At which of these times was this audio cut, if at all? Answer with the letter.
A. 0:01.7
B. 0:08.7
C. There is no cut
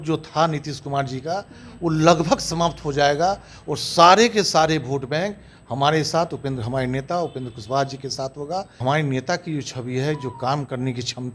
B